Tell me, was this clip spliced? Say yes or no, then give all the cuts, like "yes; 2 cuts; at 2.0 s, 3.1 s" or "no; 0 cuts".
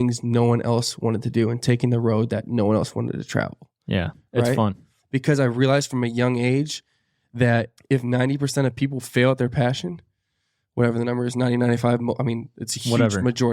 no; 0 cuts